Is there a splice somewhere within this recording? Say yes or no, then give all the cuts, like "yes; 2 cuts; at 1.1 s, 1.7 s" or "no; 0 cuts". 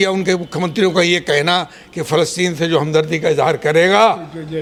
no; 0 cuts